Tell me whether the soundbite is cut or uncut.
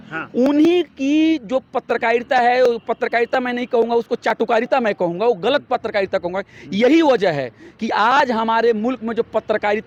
uncut